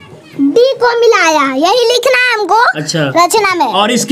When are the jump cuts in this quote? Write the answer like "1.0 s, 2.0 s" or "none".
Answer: none